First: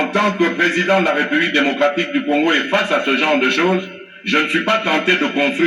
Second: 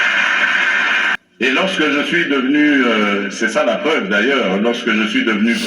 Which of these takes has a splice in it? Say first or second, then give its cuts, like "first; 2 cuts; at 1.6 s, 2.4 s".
second; 1 cut; at 1.2 s